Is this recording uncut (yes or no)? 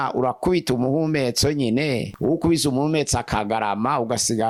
yes